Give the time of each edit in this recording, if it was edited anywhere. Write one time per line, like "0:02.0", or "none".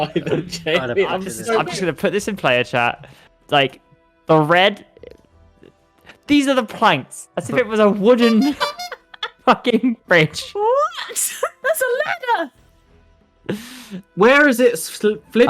0:01.4